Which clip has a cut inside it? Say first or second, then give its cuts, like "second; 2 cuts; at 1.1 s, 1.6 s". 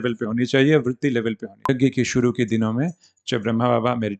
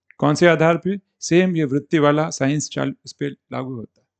first; 1 cut; at 1.7 s